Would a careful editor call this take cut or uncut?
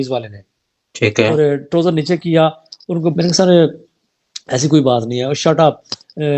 cut